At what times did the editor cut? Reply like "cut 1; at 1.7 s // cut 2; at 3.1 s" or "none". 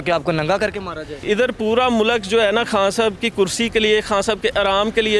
cut 1; at 1.2 s